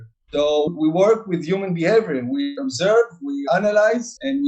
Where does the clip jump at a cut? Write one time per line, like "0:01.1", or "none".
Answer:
0:02.6
0:03.4